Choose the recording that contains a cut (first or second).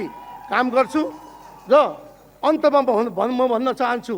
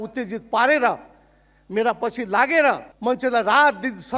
second